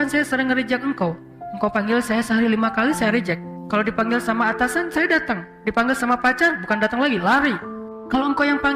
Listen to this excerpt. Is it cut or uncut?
cut